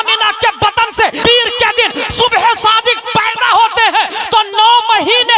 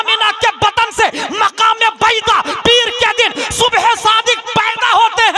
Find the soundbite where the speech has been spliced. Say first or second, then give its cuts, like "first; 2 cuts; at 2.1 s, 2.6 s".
first; 1 cut; at 1.2 s